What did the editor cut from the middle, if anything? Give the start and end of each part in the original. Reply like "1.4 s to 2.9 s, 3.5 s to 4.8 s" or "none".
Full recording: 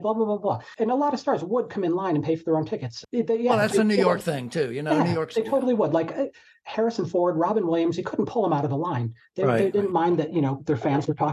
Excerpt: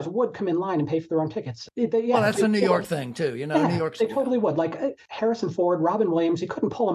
6.4 s to 6.6 s